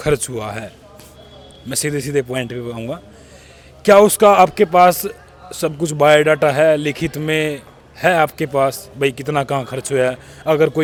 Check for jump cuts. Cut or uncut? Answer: uncut